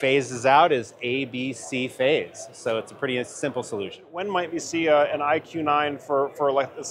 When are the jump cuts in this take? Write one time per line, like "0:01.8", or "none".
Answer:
0:04.2